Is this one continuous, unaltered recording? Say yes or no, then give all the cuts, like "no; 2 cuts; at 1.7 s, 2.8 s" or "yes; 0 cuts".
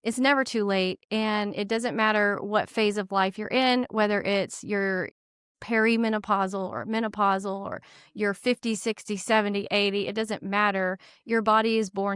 yes; 0 cuts